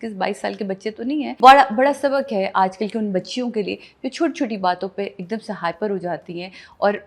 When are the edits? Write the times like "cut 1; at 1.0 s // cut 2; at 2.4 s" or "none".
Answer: cut 1; at 1.4 s